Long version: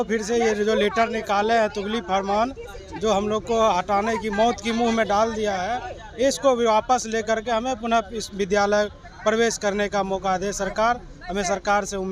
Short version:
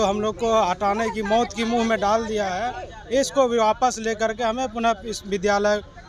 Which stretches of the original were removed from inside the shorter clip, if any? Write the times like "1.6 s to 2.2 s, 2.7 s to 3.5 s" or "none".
none